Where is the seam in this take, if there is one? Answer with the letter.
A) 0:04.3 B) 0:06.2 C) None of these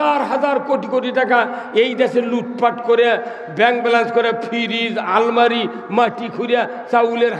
C